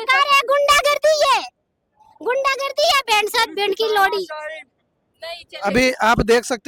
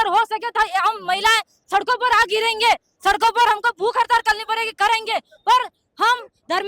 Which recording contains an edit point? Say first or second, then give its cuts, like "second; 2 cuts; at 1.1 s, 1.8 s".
second; 1 cut; at 2.6 s